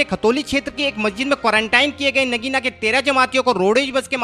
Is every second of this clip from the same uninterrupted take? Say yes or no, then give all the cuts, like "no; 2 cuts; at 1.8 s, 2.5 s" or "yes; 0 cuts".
yes; 0 cuts